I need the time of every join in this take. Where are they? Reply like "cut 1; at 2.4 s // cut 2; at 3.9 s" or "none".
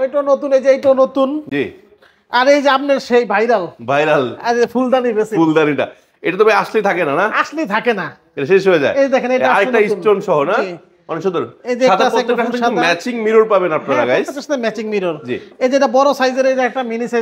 none

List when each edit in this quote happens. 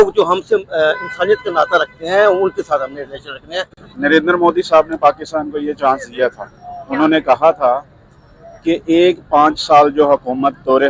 cut 1; at 3.8 s

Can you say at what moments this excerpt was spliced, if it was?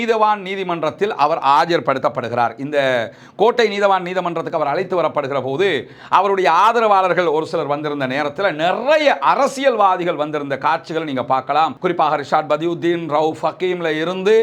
none

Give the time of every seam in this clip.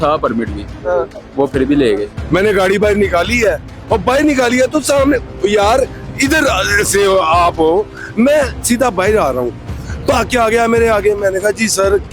cut 1; at 2.1 s

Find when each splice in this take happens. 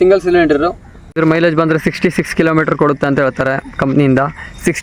cut 1; at 1.1 s

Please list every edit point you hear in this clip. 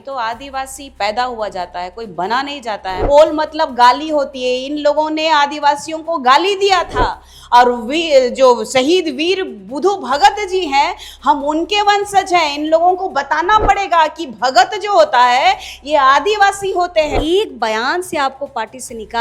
cut 1; at 2.9 s // cut 2; at 17.1 s

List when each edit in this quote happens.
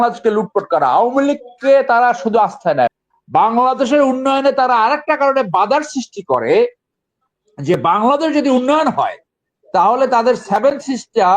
cut 1; at 2.9 s

